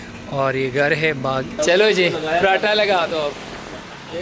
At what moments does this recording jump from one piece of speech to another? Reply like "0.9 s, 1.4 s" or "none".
1.5 s

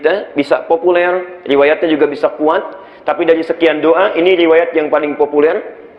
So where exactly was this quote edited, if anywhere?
none

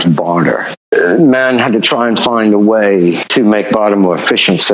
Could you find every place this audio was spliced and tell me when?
0.9 s, 3.2 s

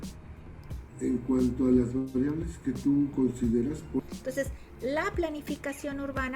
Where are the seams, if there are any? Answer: 4.0 s

